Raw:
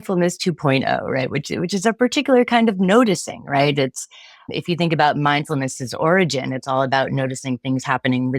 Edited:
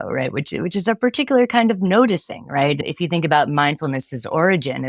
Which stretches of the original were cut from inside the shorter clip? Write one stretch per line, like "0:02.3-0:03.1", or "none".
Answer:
0:03.8-0:04.5